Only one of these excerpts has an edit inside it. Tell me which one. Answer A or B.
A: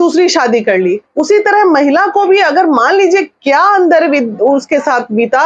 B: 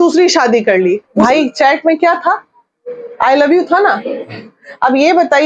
B